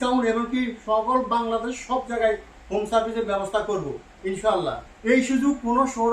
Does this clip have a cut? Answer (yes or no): yes